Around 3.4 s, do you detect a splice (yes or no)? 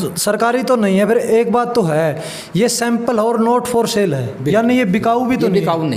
no